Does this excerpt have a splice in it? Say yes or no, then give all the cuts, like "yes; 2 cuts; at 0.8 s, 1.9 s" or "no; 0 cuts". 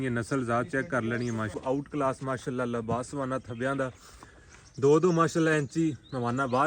yes; 1 cut; at 1.6 s